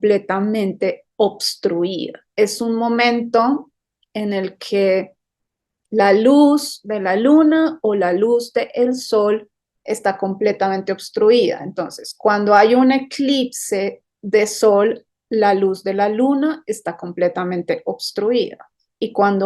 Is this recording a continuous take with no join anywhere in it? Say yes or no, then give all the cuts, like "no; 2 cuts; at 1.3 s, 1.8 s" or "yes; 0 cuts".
yes; 0 cuts